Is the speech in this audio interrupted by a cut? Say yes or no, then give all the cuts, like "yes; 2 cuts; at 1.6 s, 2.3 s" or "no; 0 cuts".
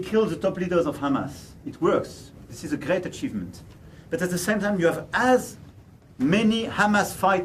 no; 0 cuts